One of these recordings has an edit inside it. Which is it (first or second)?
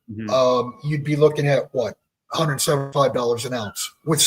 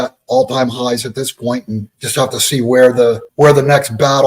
second